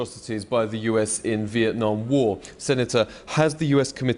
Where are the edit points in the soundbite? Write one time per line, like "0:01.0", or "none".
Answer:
none